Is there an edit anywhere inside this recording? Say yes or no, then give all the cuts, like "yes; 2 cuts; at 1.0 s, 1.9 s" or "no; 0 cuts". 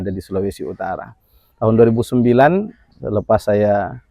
no; 0 cuts